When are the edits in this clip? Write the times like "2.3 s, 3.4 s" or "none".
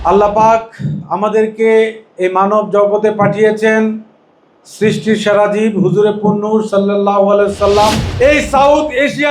8.2 s